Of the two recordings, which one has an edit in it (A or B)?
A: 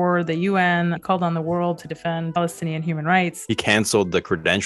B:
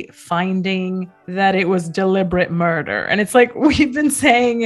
A